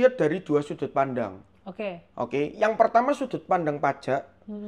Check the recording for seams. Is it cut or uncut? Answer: uncut